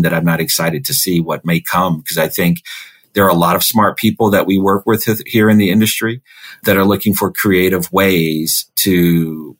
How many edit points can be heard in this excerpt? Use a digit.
1